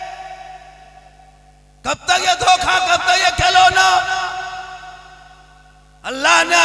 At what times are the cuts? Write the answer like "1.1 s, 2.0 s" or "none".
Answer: none